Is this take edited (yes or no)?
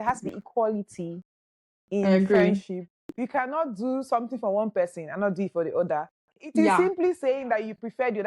no